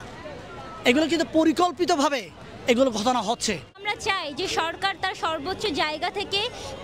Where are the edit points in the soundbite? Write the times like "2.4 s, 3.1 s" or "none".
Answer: 3.9 s

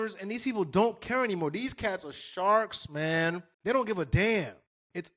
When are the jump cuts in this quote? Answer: 3.5 s

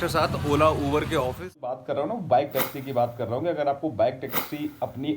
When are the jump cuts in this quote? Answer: 1.8 s

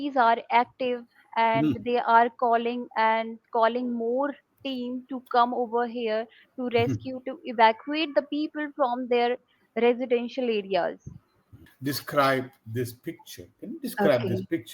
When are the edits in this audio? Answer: 11.7 s

